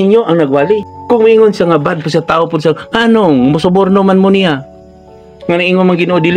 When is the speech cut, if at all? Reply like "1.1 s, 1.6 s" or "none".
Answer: 0.9 s